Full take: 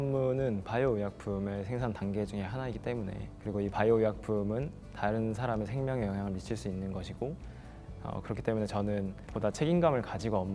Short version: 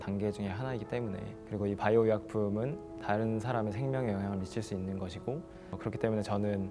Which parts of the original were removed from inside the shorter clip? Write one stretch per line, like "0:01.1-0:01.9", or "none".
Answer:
0:07.7-0:08.2